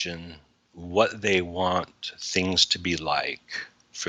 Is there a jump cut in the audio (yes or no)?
no